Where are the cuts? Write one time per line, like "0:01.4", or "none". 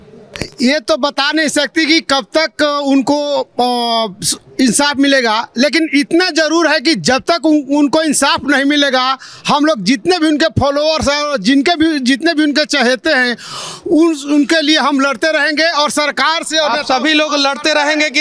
none